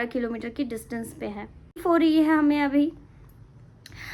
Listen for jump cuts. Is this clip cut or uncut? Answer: cut